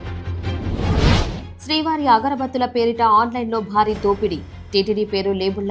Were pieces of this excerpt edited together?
yes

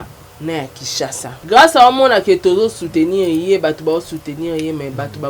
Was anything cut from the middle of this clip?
yes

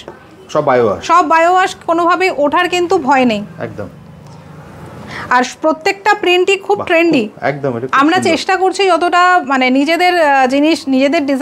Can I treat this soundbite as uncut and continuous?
yes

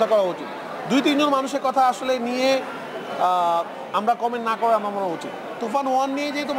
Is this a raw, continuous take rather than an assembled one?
no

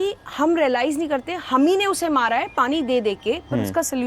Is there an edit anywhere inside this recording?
no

